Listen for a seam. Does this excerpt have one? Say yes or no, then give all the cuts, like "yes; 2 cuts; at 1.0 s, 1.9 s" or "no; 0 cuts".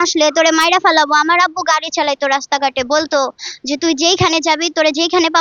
no; 0 cuts